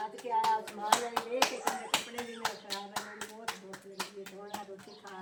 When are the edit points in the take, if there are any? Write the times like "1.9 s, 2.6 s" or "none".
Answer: none